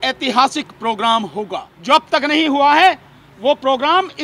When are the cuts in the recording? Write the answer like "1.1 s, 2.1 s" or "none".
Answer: 1.7 s